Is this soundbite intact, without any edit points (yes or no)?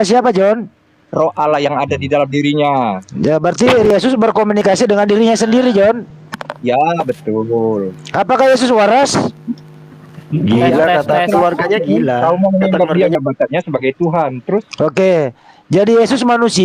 no